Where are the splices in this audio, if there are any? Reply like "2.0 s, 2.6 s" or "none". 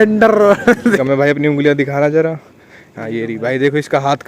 1.0 s